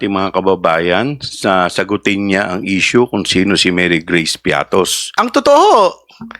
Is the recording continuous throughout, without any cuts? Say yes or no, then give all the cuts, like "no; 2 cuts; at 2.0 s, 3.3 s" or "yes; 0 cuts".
no; 1 cut; at 5.0 s